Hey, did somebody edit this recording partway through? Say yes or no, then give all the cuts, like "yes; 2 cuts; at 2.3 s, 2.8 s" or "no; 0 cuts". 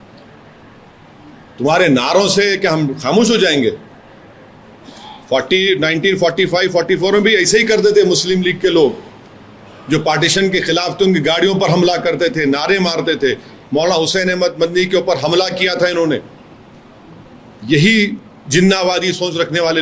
no; 0 cuts